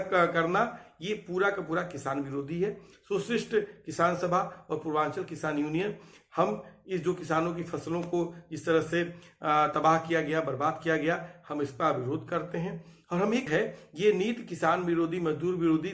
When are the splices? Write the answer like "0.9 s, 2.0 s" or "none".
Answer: 13.5 s